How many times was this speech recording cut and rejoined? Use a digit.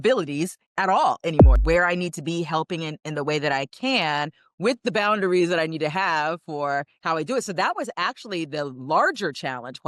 1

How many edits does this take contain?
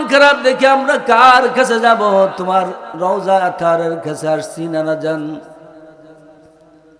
0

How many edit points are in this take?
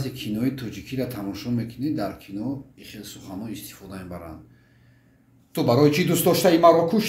0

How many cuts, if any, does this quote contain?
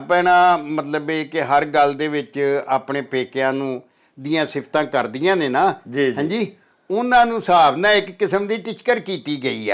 0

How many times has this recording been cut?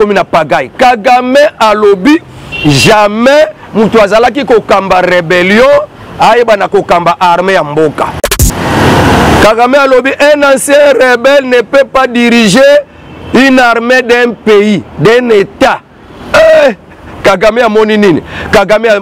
1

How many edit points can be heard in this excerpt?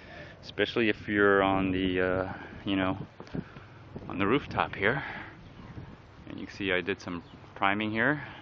1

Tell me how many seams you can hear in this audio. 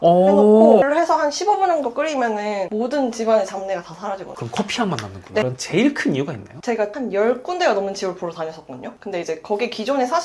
2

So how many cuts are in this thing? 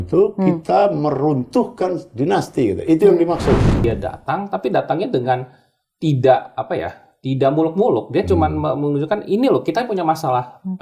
1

